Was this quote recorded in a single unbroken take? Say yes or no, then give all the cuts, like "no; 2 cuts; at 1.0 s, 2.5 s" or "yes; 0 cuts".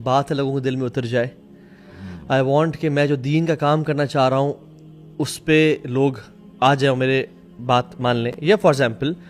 yes; 0 cuts